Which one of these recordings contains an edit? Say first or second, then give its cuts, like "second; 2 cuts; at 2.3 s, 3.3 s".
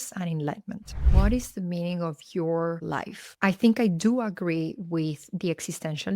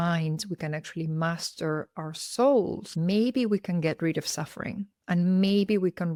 first; 1 cut; at 1.0 s